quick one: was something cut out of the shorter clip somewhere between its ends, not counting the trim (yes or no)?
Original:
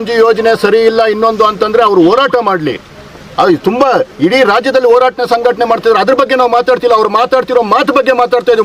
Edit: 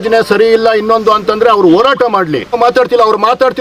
yes